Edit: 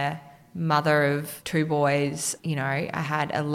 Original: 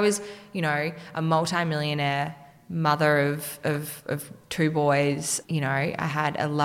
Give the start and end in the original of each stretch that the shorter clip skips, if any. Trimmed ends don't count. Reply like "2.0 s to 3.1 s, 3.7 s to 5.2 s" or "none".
3.5 s to 4.4 s